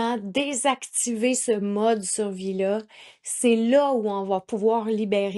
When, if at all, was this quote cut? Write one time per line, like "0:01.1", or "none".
none